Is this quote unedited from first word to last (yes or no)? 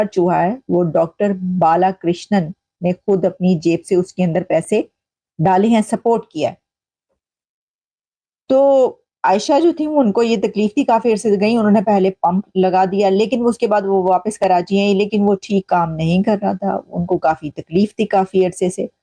yes